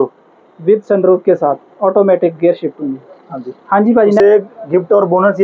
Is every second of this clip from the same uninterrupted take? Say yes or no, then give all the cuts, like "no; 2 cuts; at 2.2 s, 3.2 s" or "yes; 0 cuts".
no; 1 cut; at 4.2 s